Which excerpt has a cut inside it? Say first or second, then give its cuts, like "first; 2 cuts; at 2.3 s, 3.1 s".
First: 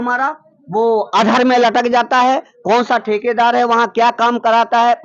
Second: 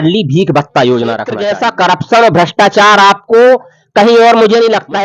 second; 1 cut; at 1.4 s